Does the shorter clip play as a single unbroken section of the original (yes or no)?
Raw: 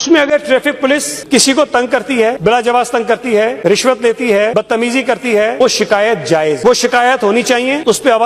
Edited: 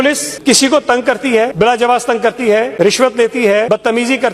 yes